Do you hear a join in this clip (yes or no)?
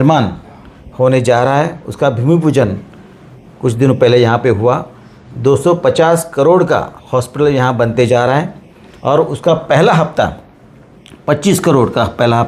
no